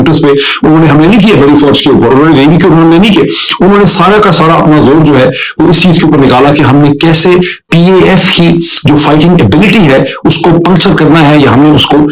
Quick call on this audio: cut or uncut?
uncut